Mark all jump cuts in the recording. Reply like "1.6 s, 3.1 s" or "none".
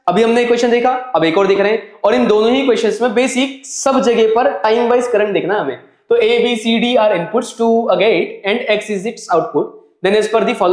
none